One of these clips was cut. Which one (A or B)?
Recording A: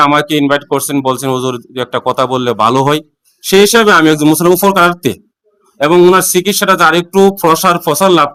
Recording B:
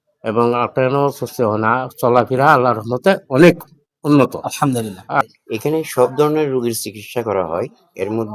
B